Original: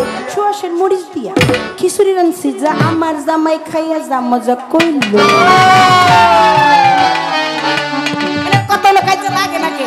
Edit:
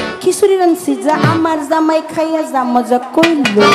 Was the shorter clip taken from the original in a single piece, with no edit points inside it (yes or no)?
yes